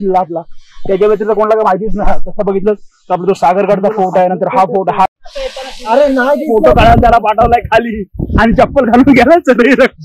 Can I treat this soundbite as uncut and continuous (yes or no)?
no